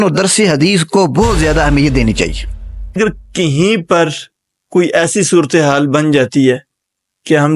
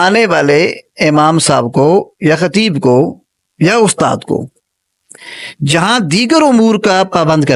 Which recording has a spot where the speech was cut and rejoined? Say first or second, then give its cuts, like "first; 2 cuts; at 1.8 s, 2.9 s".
first; 1 cut; at 3.0 s